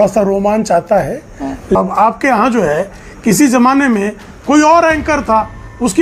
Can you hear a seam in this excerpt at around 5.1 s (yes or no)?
no